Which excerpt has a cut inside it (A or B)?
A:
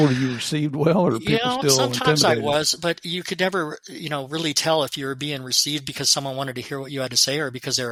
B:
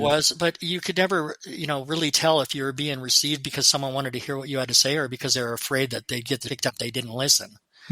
B